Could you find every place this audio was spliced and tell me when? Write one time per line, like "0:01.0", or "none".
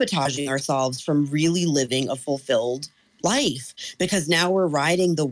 none

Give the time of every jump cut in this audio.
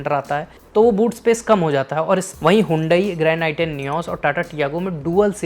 0:02.3

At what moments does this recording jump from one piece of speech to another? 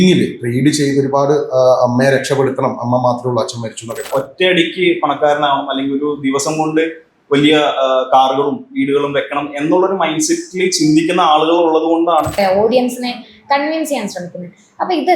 0:04.1
0:12.4

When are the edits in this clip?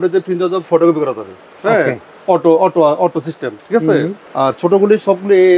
none

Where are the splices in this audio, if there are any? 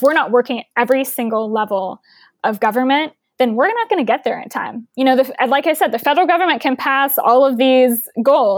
none

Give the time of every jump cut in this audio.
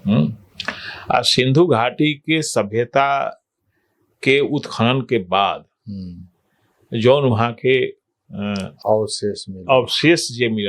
none

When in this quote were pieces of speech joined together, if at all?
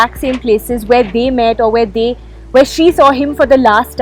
none

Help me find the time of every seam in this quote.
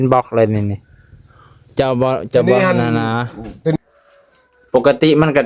0:03.7

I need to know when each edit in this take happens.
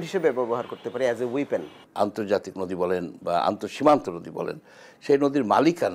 0:01.8

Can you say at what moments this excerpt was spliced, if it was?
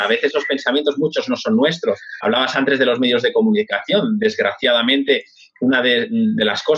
0:02.1

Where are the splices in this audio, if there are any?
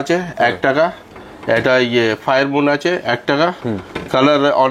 none

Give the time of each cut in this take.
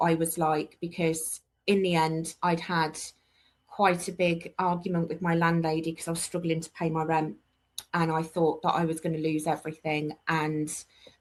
none

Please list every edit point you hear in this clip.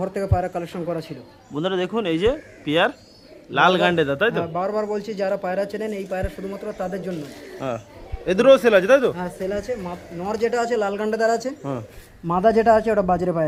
none

